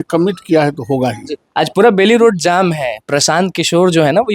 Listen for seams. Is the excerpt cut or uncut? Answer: uncut